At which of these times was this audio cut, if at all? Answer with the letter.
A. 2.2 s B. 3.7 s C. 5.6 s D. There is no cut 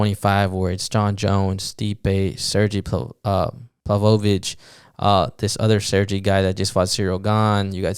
B